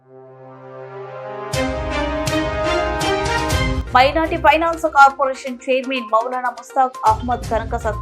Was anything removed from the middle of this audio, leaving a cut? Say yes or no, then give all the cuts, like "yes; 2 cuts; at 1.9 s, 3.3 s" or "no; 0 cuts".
yes; 1 cut; at 3.8 s